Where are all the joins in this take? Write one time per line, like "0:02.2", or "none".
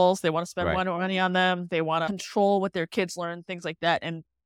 0:02.1